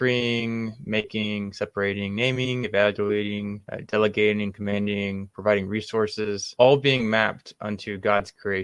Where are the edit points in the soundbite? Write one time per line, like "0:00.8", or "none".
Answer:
none